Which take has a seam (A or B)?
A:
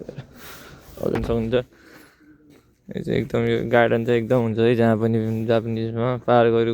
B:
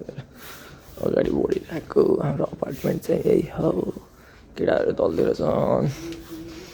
A